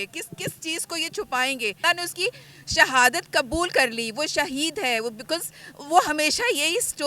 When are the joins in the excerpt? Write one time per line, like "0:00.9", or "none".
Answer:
0:01.8